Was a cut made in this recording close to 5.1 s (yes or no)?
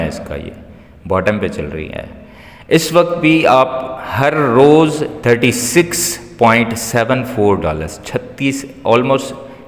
yes